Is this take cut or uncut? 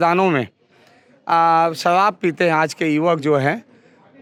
uncut